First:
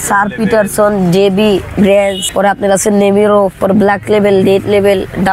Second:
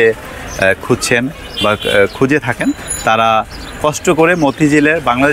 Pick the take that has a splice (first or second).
first